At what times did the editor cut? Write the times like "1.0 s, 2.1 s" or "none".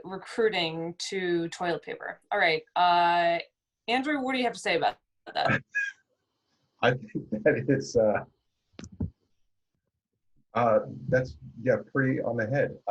none